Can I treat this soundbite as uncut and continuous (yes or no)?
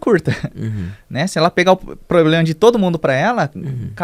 yes